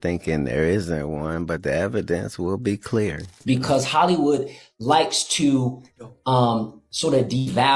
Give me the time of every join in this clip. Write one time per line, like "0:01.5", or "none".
0:03.4